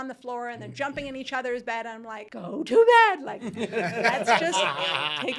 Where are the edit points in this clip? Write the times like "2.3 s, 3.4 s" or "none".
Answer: 2.3 s